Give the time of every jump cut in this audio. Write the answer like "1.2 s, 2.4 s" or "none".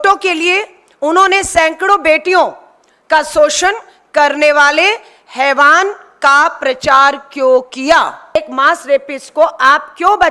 8.4 s